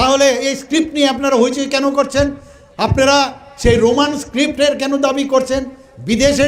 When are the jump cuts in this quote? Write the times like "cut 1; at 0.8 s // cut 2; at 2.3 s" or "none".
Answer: none

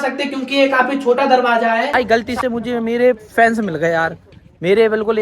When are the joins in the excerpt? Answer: cut 1; at 1.9 s

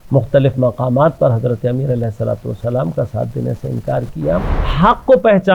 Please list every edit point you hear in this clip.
cut 1; at 4.6 s

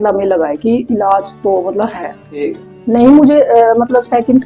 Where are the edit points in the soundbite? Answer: cut 1; at 2.3 s

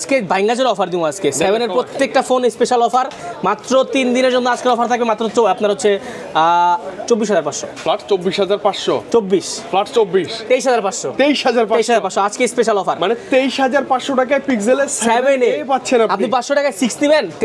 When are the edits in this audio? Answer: none

